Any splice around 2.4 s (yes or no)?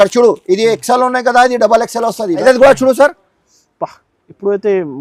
yes